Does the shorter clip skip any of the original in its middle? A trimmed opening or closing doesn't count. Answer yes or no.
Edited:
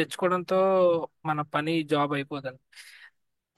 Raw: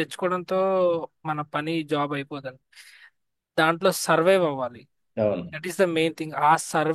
no